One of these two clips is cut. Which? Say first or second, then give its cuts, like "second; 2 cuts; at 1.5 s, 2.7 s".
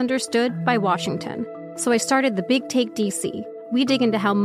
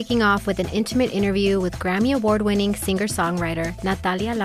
first; 2 cuts; at 1.6 s, 3.5 s